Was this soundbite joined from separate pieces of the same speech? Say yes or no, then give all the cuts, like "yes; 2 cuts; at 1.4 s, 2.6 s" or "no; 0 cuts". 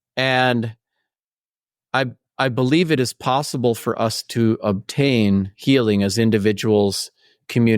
no; 0 cuts